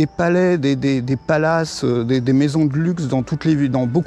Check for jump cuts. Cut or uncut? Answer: uncut